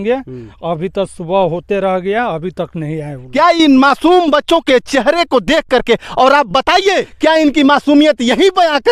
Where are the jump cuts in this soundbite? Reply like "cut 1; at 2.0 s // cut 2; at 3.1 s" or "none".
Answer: cut 1; at 3.2 s // cut 2; at 7.1 s